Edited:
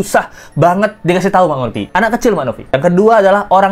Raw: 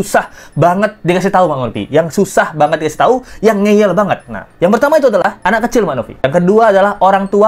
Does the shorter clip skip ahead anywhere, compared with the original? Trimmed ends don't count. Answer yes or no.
yes